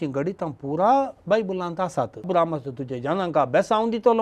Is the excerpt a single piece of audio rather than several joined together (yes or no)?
no